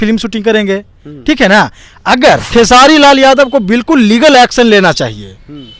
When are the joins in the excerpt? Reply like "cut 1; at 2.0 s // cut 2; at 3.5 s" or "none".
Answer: cut 1; at 2.5 s